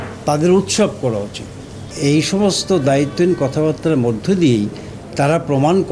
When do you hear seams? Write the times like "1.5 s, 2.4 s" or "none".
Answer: 1.9 s